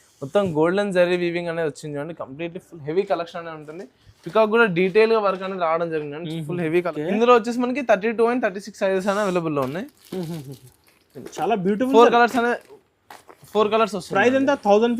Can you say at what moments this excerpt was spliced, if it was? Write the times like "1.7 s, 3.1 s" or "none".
6.9 s